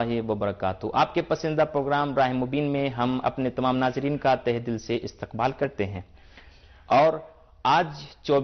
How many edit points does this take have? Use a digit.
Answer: 1